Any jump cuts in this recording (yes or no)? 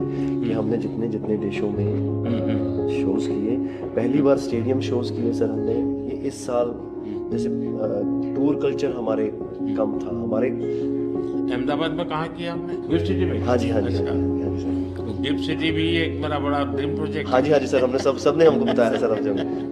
yes